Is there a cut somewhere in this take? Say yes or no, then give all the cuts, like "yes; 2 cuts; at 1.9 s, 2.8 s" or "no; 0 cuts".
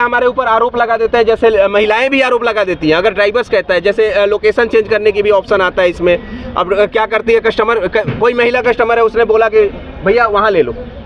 no; 0 cuts